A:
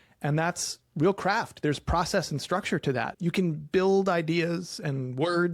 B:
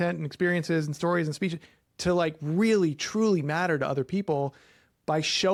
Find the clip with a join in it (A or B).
A